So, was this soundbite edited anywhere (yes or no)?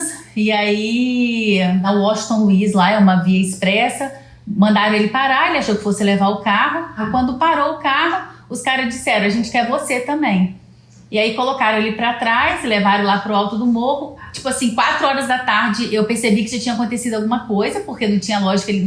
yes